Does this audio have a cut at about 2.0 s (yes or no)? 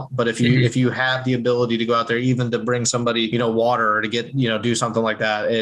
no